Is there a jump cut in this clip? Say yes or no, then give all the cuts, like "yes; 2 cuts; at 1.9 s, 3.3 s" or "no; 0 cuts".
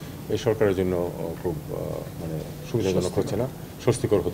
no; 0 cuts